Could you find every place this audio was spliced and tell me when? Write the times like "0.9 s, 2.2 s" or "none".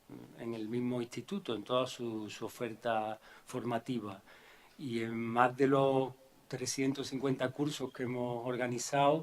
4.9 s